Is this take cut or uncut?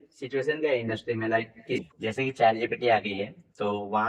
cut